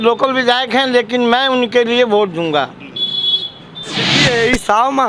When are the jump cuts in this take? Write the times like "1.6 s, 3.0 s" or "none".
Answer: 4.1 s